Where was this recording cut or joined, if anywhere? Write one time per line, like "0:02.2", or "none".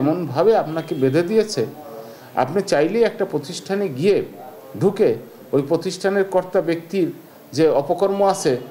none